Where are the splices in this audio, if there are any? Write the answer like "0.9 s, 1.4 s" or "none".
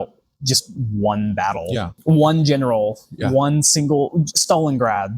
1.9 s